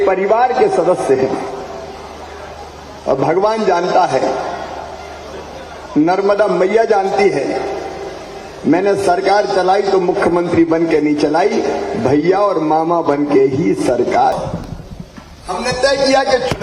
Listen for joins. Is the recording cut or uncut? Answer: cut